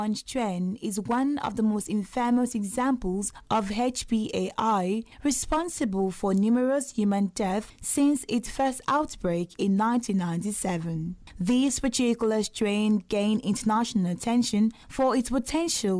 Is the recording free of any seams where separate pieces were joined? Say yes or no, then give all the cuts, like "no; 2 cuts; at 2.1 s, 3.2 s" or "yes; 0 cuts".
yes; 0 cuts